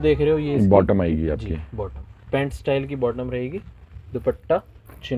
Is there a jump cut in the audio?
no; 0 cuts

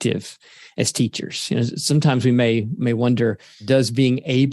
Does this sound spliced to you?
yes; 2 cuts; at 2.7 s, 3.6 s

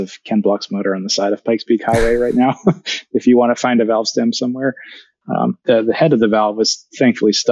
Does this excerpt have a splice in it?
no; 0 cuts

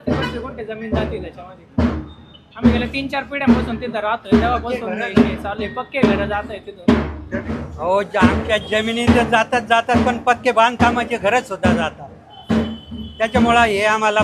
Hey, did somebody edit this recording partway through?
yes; 1 cut; at 7.6 s

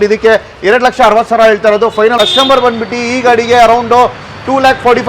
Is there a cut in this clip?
yes; 1 cut; at 2.1 s

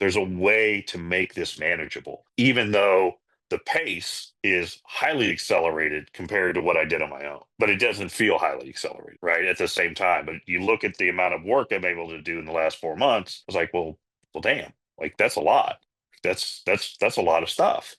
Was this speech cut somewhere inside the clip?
no; 0 cuts

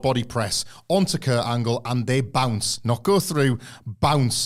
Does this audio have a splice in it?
no; 0 cuts

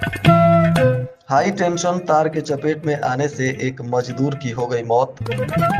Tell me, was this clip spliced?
yes; 1 cut; at 1.1 s

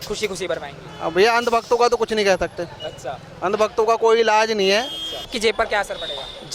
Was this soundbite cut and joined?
yes; 1 cut; at 5.3 s

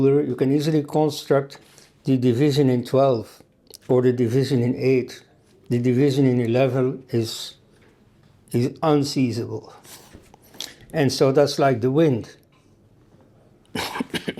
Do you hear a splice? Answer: no; 0 cuts

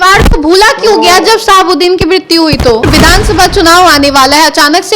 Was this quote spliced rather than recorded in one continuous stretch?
yes; 1 cut; at 2.8 s

